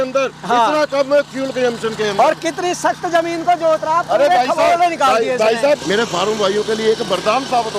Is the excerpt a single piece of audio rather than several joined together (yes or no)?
no